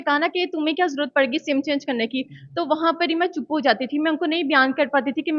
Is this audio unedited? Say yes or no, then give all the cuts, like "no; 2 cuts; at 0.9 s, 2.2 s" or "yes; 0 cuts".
yes; 0 cuts